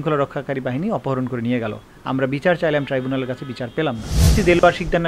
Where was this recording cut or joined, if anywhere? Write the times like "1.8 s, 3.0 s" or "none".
4.1 s